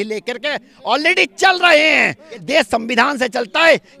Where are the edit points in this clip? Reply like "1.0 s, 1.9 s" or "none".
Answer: 2.4 s

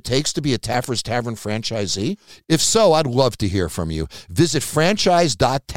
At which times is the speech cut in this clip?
none

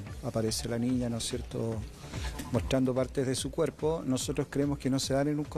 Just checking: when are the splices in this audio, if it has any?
none

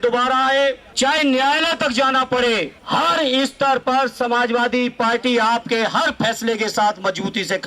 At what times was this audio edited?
0.9 s, 2.8 s

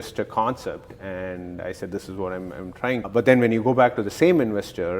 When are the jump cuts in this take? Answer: 3.1 s

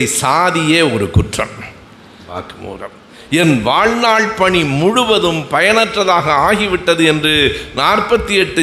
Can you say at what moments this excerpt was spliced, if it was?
2.3 s

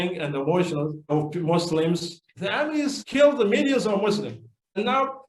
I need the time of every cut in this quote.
none

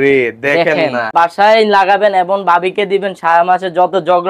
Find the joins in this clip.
1.1 s

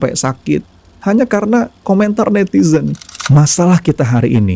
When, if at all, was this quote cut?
3.1 s

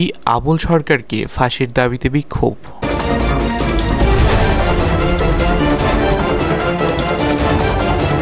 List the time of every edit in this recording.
none

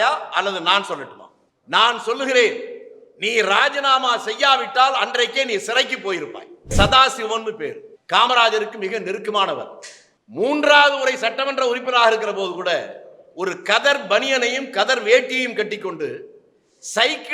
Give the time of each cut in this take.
6.7 s, 10.0 s

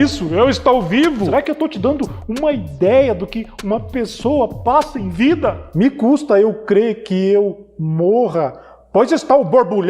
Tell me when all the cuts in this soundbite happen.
1.3 s, 5.6 s

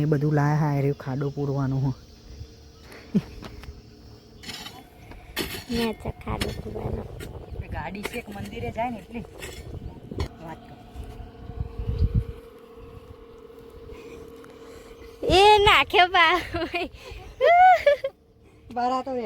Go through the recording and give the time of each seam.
4.4 s, 10.2 s

